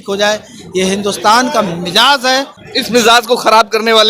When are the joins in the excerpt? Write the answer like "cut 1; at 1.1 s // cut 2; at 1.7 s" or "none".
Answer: cut 1; at 2.6 s